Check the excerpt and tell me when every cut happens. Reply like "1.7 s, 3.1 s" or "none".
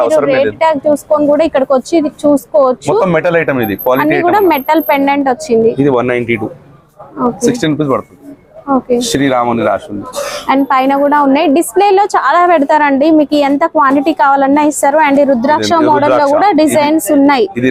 none